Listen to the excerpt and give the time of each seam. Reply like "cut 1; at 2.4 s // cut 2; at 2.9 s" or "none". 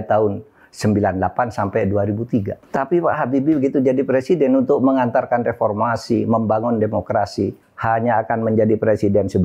cut 1; at 2.6 s // cut 2; at 7.7 s